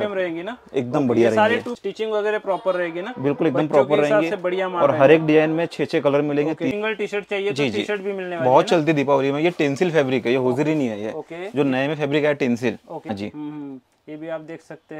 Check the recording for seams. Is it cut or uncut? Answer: cut